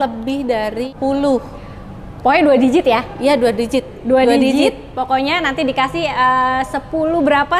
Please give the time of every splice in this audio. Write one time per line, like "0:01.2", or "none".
0:00.9